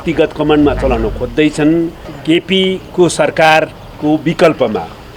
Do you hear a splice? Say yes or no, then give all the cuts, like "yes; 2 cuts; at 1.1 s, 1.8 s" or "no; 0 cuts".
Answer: yes; 1 cut; at 2.1 s